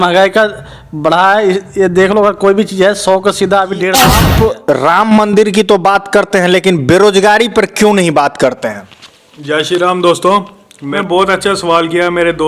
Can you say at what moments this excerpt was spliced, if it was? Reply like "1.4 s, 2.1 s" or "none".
4.1 s, 10.9 s